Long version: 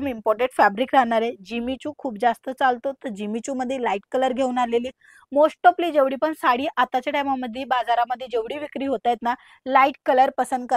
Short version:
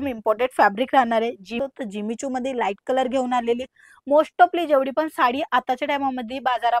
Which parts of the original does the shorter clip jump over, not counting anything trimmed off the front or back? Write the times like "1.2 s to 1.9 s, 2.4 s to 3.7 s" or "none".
1.6 s to 2.8 s